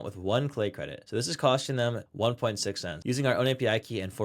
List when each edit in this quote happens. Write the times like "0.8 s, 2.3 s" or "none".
0.9 s, 2.0 s, 2.9 s